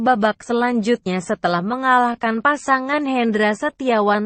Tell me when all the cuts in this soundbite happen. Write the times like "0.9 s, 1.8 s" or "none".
none